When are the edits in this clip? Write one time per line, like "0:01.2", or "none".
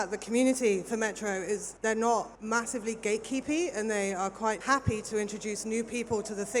0:01.7
0:02.4
0:04.6